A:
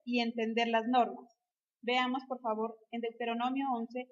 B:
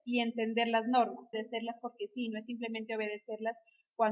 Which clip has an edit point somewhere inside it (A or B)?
A